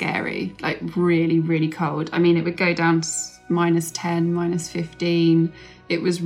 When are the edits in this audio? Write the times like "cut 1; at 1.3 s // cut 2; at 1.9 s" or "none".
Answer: none